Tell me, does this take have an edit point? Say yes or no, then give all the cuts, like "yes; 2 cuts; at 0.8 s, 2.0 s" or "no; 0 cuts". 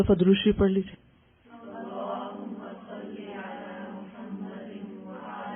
no; 0 cuts